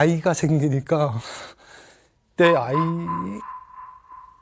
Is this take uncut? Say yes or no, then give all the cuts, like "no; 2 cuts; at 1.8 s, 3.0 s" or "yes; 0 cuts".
yes; 0 cuts